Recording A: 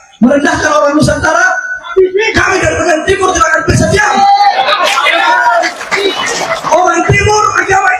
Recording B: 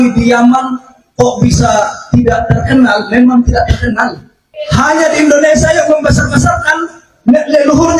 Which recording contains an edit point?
B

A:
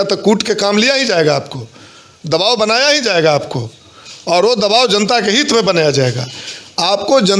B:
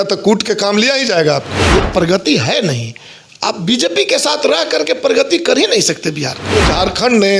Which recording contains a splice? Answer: B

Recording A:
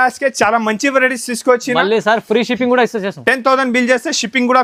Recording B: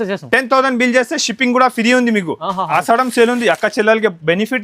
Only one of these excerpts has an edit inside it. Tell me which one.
B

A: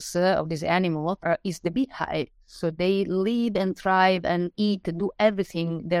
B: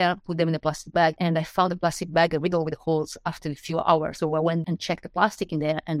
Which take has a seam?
B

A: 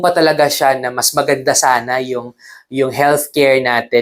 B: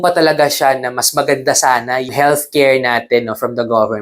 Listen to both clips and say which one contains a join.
B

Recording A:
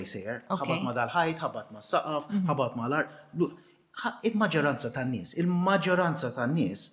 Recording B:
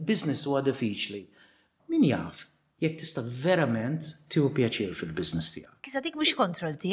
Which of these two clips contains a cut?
B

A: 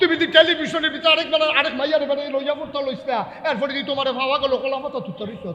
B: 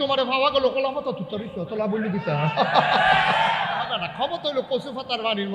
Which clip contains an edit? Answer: B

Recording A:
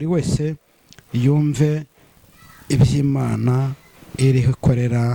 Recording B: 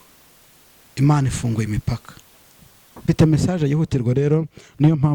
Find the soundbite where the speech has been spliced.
B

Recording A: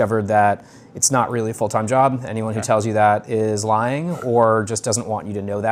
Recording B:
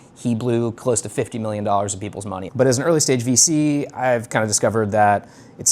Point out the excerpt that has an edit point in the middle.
B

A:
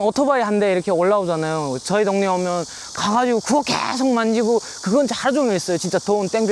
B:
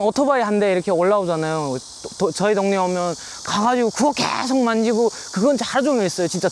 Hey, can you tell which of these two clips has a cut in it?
A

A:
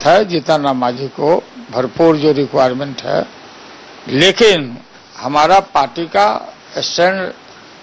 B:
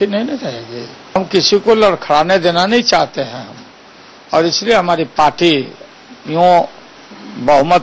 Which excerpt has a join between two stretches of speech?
B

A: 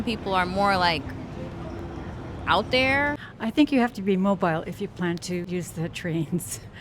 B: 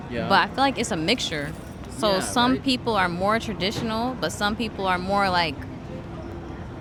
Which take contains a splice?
A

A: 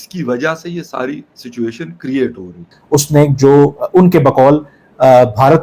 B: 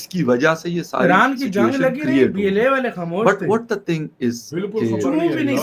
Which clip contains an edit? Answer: A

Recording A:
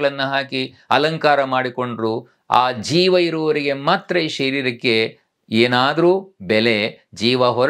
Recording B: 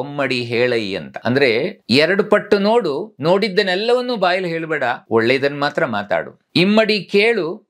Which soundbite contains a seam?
B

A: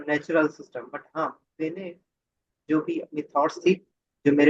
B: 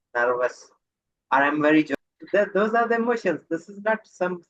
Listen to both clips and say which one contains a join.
B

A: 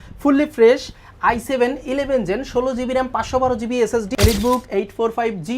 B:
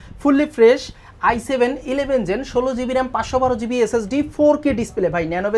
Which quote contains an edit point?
A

